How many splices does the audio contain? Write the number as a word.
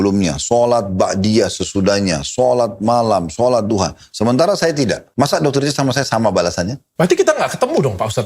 two